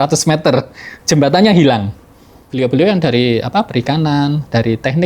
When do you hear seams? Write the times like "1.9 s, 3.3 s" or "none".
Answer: 2.5 s